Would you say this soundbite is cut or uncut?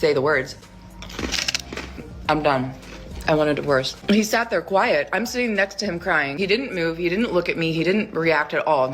cut